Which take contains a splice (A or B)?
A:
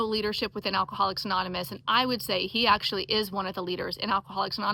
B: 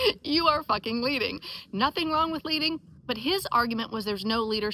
B